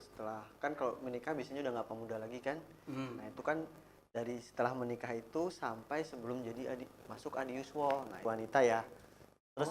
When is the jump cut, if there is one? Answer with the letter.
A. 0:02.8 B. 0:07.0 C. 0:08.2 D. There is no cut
C